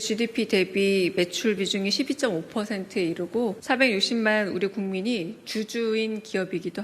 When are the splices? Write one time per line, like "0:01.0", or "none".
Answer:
0:03.6